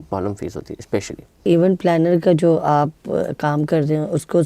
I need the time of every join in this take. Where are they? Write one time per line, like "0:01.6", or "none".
0:01.5